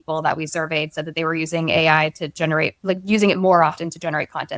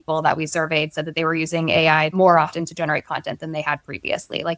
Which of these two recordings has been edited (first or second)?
second